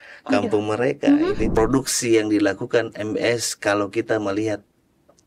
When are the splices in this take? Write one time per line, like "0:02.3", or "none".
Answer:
0:01.5